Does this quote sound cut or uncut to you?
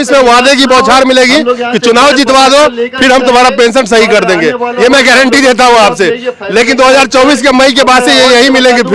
uncut